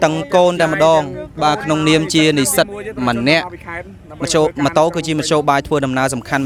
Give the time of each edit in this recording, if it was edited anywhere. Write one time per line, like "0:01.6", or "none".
none